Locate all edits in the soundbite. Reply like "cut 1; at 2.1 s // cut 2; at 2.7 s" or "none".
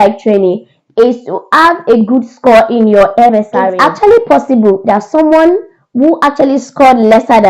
cut 1; at 3.6 s